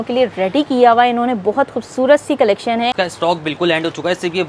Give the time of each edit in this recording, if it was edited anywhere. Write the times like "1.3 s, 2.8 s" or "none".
2.9 s